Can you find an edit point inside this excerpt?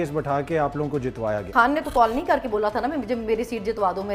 yes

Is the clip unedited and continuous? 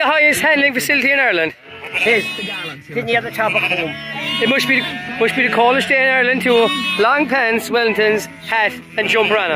yes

